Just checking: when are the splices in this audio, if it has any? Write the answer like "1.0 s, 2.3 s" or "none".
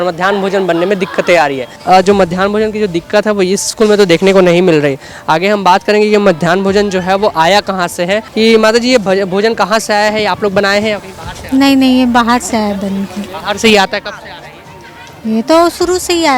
1.8 s, 8.3 s